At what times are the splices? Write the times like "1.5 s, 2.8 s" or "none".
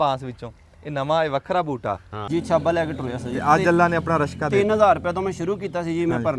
2.3 s